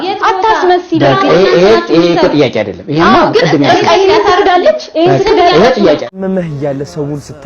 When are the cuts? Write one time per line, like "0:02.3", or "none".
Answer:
0:06.2